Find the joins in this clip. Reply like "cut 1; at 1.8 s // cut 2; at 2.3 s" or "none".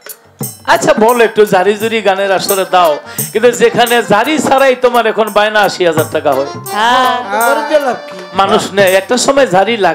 none